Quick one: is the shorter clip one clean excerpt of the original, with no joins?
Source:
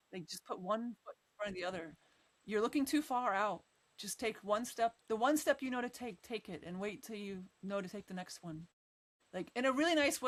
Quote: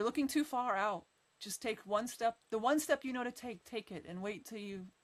yes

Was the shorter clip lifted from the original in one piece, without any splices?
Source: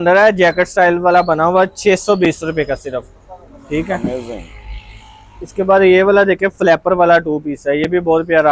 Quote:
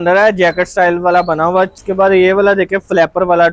no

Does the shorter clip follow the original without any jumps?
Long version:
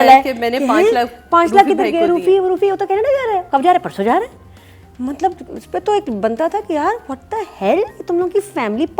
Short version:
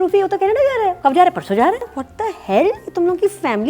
no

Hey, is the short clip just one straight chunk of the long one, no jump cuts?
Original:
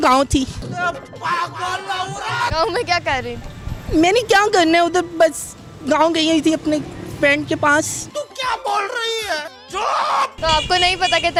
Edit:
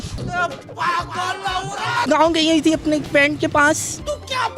no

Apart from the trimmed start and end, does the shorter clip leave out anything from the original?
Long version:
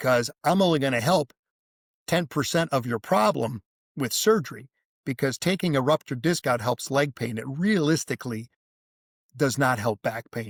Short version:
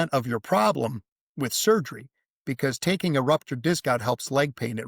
no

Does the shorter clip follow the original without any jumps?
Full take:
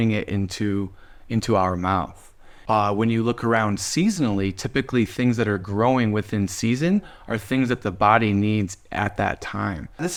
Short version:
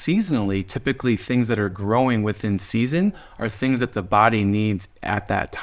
yes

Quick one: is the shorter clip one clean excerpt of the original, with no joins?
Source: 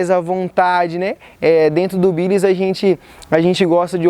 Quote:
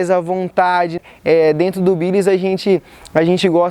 no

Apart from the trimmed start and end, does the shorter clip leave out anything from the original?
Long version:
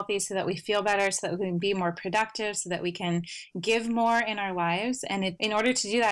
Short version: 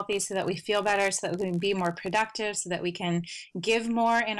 no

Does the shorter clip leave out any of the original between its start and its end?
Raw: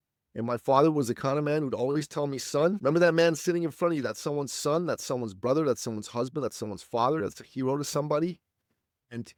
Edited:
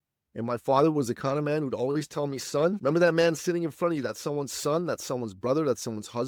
no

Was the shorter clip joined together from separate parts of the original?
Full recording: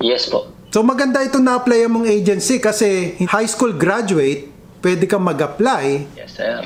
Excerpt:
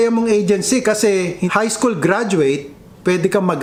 no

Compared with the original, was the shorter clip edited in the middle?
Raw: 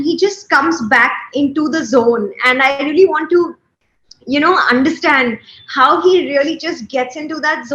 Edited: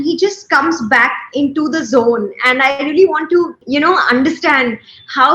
yes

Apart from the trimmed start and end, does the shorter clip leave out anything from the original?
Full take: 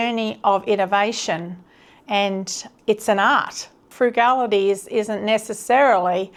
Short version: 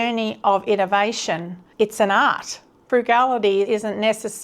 yes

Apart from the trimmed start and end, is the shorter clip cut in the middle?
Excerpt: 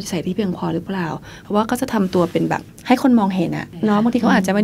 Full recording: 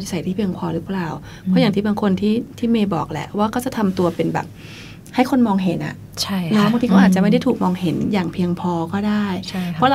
yes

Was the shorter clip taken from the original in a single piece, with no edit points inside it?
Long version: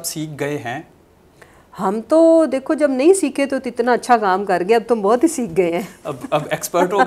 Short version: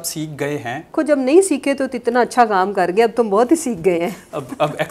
no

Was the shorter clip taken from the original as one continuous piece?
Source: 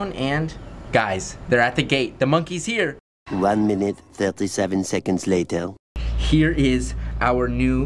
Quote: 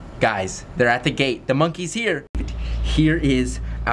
no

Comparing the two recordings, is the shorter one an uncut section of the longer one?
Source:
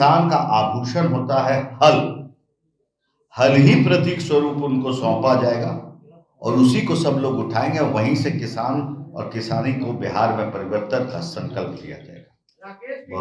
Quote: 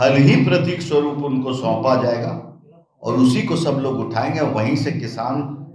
yes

